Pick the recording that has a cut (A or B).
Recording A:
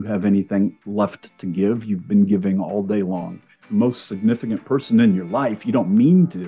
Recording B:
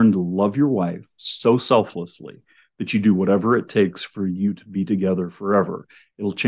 A